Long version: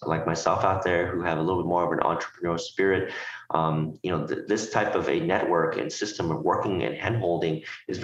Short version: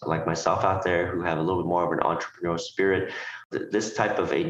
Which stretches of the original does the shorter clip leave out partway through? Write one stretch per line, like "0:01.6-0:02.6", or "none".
0:03.5-0:04.2